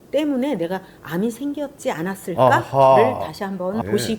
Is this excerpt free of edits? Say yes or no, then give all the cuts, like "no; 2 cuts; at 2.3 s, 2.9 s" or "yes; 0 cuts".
yes; 0 cuts